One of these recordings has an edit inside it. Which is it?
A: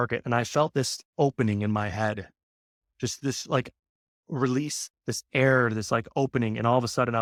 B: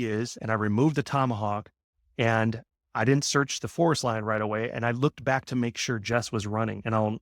B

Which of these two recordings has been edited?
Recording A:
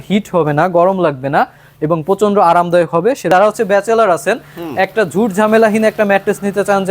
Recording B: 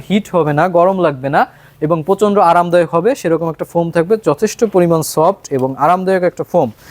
A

